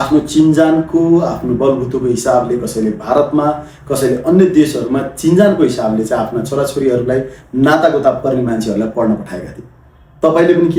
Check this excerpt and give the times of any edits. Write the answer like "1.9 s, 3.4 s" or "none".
none